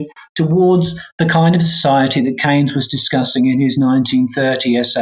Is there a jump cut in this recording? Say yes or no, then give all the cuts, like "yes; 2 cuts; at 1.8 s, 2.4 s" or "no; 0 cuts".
no; 0 cuts